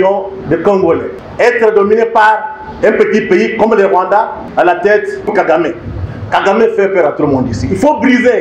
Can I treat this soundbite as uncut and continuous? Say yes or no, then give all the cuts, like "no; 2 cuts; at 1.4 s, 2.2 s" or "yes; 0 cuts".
no; 2 cuts; at 1.2 s, 4.4 s